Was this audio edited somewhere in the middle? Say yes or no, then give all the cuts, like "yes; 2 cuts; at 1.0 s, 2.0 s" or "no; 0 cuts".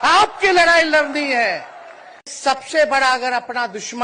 yes; 1 cut; at 2.2 s